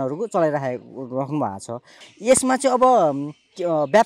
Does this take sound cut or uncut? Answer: cut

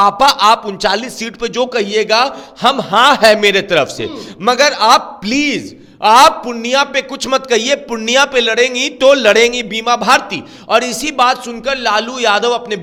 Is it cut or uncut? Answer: uncut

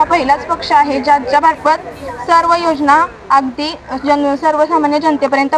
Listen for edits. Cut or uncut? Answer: uncut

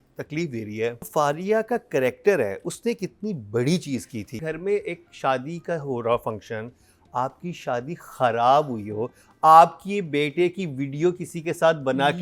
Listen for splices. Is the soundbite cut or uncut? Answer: cut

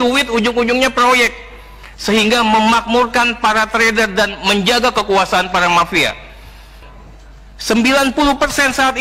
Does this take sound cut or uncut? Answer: cut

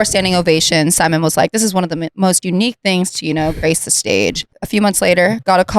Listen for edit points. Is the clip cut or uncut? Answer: cut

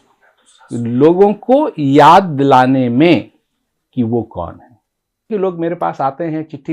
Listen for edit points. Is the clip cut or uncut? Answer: cut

